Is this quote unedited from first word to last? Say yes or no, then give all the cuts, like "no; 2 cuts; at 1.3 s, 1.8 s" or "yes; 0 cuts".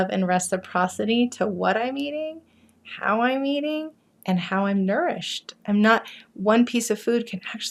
yes; 0 cuts